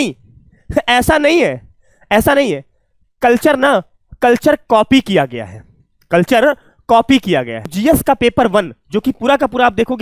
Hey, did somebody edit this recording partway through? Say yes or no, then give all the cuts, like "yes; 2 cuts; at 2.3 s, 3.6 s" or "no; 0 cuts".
no; 0 cuts